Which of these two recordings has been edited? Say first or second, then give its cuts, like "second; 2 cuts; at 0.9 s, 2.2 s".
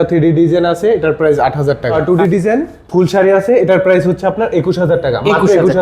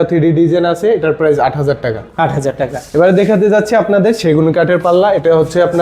first; 1 cut; at 1.9 s